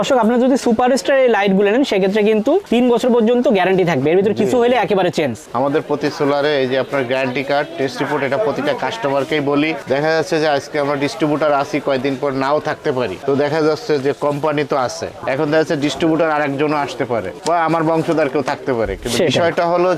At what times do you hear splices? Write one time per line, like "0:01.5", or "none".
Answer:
none